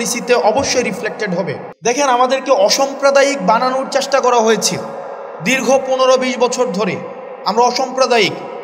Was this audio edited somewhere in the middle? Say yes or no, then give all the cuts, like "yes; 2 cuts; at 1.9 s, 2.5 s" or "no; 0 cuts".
yes; 1 cut; at 1.6 s